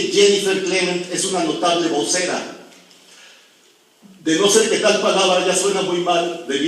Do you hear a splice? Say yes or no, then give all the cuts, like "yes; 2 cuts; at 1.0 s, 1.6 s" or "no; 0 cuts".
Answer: yes; 1 cut; at 3.9 s